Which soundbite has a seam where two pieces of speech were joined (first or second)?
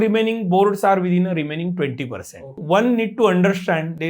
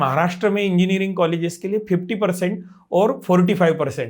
first